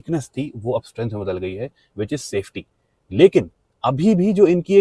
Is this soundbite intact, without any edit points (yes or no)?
yes